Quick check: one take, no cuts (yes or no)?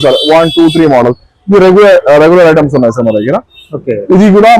yes